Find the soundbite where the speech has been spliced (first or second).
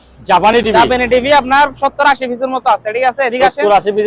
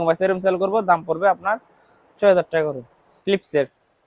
second